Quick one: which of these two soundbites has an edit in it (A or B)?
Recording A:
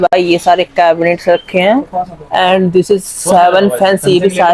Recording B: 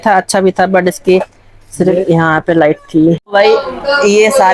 B